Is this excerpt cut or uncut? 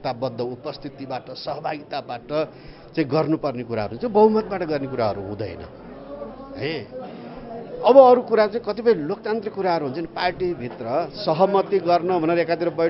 uncut